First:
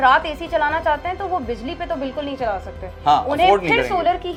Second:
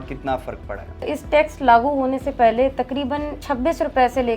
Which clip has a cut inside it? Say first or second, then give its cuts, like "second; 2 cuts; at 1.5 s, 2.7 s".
second; 2 cuts; at 1.0 s, 3.4 s